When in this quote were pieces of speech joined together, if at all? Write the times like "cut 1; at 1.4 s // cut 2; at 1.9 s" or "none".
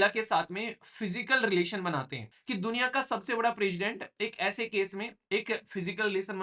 cut 1; at 2.3 s